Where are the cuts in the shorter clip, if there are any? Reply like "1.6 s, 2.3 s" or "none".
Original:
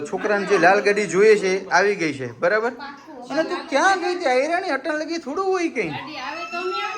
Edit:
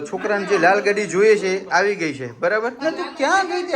2.8 s